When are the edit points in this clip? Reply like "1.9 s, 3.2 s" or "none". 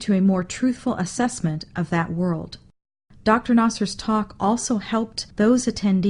none